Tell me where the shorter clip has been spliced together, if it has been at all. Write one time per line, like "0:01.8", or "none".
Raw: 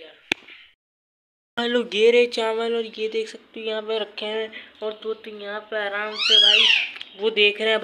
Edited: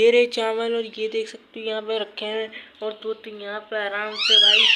none